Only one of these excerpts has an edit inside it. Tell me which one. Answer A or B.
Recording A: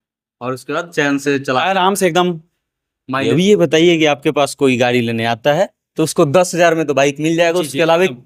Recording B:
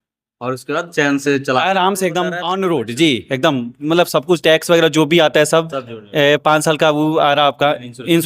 B